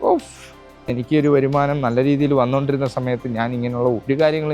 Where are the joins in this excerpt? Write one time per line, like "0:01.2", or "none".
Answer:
0:00.9